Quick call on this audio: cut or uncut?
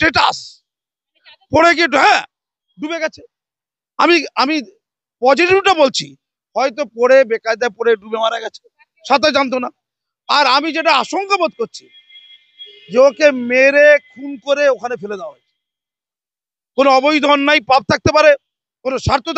uncut